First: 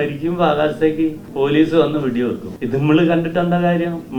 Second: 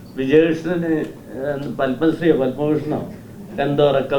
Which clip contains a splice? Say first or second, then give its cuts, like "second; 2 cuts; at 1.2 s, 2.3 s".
first; 2 cuts; at 1.2 s, 2.5 s